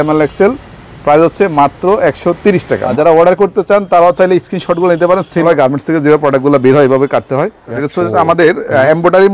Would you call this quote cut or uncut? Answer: cut